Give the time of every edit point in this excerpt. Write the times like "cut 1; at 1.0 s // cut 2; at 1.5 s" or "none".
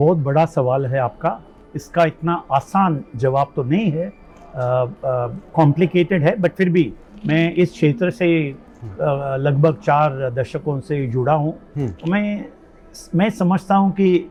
none